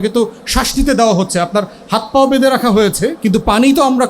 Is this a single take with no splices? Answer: no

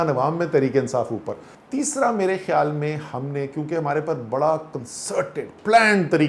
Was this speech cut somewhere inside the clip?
no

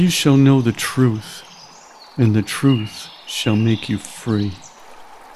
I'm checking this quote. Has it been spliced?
no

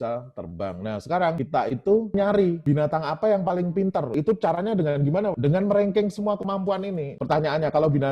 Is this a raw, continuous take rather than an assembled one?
no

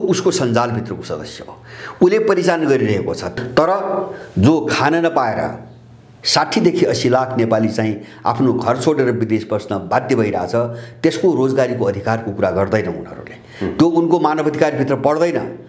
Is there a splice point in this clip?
yes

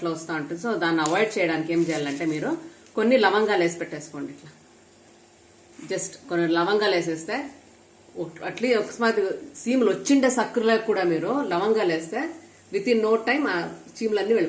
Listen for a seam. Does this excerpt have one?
no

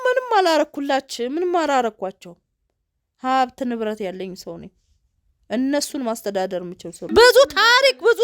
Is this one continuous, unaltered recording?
no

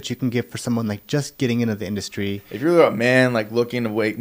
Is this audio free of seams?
no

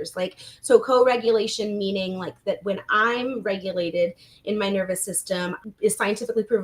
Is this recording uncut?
no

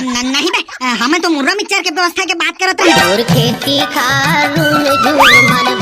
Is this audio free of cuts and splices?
no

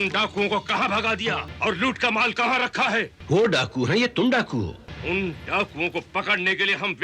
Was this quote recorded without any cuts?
no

